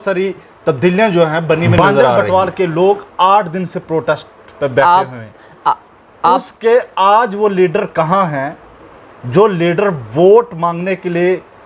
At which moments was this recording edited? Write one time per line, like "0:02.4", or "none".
0:02.0